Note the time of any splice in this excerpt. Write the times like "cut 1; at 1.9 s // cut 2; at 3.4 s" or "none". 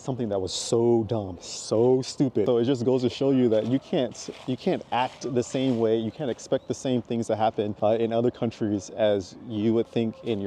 cut 1; at 2.4 s // cut 2; at 7.7 s

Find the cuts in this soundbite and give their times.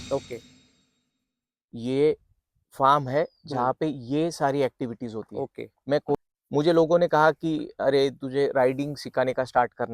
cut 1; at 6.1 s

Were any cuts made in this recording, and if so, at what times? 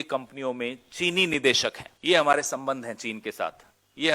cut 1; at 1.9 s

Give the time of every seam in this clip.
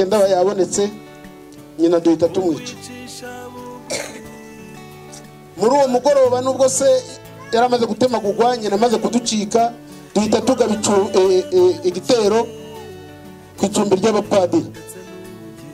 none

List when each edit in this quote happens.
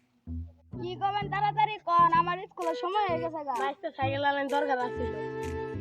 cut 1; at 4.9 s

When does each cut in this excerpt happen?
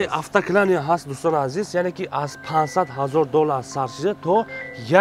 none

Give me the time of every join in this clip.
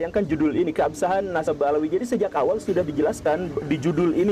none

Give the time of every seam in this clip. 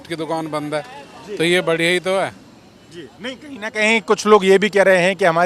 none

